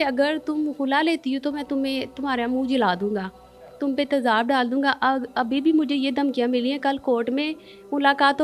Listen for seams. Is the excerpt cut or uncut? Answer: uncut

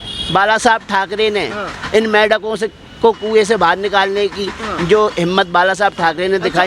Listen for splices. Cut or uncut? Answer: uncut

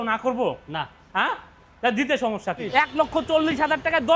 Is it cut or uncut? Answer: cut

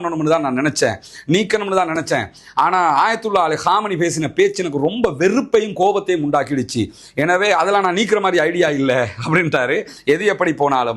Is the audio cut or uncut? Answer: cut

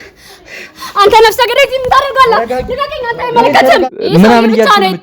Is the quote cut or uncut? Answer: cut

